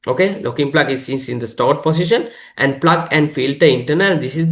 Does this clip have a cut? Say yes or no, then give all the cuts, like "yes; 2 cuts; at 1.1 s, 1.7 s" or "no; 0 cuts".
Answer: no; 0 cuts